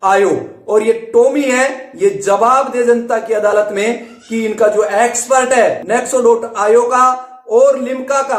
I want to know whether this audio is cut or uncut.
cut